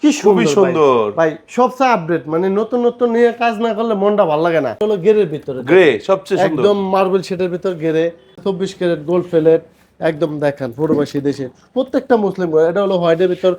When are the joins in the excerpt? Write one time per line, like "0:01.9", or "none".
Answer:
0:04.8
0:08.3